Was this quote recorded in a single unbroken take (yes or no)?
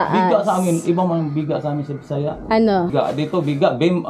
no